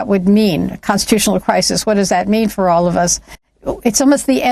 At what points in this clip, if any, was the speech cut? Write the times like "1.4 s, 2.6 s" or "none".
3.4 s